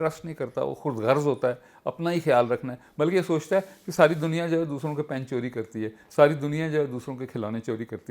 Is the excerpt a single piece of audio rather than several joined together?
yes; 0 cuts

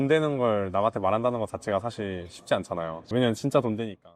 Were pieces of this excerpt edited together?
yes; 1 cut; at 3.1 s

